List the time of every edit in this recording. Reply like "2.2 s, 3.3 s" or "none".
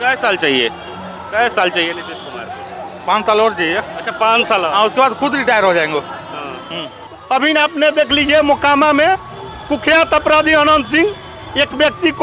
7.1 s